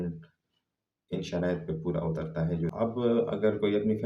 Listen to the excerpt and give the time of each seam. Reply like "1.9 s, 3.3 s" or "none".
2.7 s